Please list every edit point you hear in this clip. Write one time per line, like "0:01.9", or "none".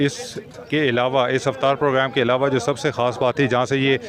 none